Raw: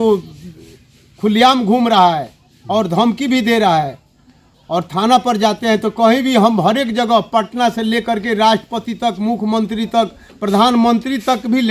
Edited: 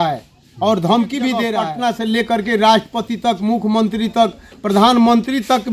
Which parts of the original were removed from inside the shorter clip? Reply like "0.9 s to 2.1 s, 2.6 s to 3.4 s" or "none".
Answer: 3.6 s to 7.3 s